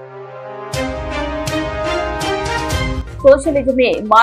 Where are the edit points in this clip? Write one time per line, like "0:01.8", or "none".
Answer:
0:03.0

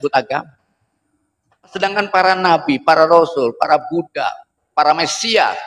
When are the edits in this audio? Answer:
0:01.7

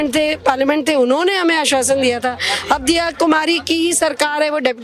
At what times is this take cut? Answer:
none

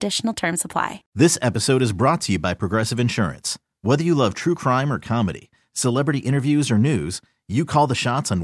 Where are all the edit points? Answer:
0:01.0

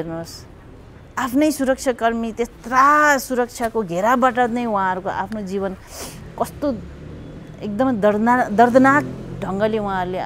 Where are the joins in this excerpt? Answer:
none

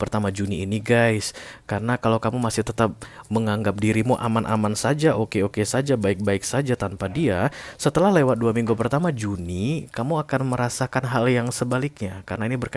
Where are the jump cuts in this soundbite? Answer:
none

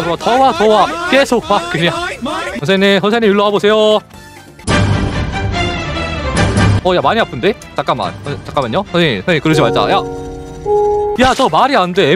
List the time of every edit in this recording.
0:02.5
0:11.1

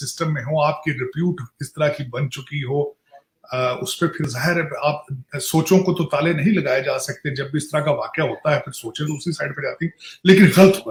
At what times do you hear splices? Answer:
none

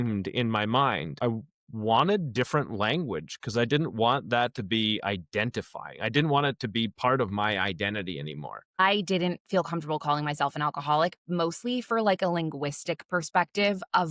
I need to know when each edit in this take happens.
0:01.1
0:08.8

